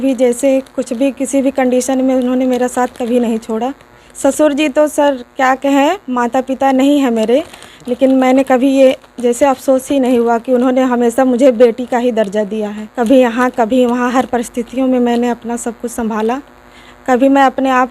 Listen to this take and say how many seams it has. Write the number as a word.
two